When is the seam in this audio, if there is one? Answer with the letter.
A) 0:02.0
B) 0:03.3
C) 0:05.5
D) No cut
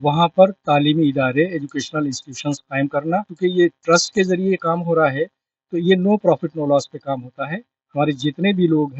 B